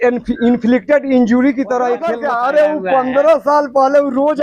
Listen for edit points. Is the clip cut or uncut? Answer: cut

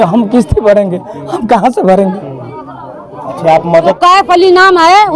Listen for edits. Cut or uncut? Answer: cut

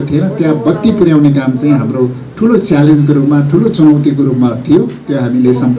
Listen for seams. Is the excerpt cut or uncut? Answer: uncut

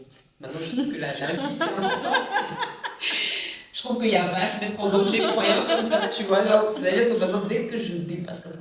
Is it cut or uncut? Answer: uncut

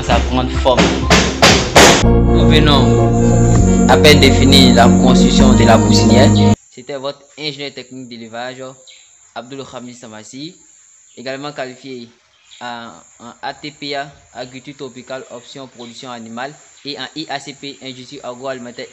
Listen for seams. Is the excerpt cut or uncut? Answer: cut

